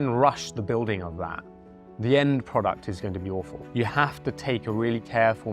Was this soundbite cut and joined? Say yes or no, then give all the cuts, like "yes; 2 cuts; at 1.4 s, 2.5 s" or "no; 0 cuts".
yes; 1 cut; at 3.6 s